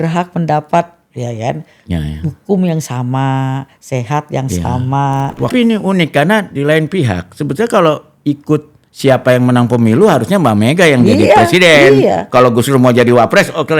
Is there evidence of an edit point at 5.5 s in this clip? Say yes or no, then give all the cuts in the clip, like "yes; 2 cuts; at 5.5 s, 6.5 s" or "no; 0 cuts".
yes; 1 cut; at 5.5 s